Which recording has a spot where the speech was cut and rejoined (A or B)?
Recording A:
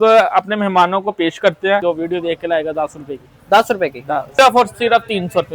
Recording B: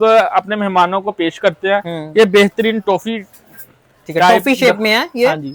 A